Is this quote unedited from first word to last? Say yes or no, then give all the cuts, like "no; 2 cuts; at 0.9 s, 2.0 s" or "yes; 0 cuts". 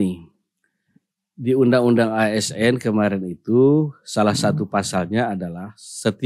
yes; 0 cuts